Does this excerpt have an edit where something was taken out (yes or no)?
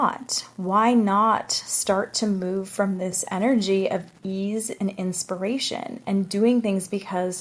yes